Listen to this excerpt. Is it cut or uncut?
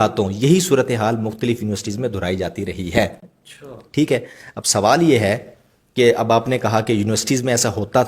uncut